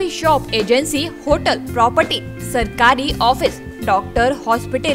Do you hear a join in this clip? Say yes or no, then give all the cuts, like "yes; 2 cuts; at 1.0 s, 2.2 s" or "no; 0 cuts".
no; 0 cuts